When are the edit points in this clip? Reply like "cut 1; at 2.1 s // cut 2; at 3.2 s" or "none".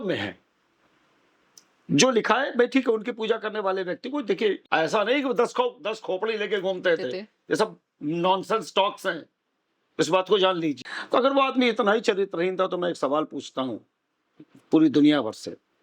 cut 1; at 4.6 s // cut 2; at 10.9 s